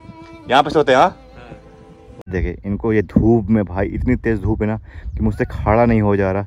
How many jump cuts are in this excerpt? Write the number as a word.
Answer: one